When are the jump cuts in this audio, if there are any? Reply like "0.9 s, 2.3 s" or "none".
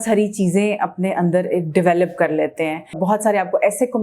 3.0 s